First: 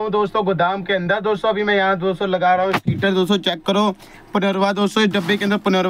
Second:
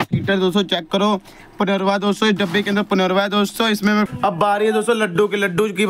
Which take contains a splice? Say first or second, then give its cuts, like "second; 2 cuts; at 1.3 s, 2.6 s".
second; 1 cut; at 4.1 s